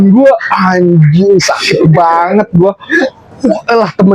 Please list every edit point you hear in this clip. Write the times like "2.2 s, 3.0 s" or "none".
none